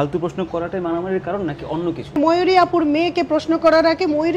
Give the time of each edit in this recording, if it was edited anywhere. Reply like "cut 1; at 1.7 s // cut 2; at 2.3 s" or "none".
cut 1; at 2.2 s